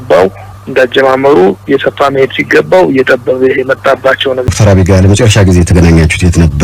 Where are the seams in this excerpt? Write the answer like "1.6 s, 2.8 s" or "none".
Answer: 4.5 s